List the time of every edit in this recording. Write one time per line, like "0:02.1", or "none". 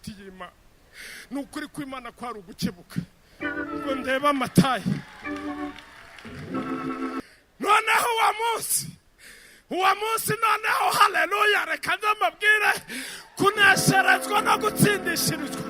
0:07.4